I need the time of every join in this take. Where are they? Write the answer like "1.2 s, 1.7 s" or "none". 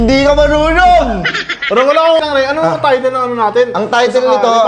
2.2 s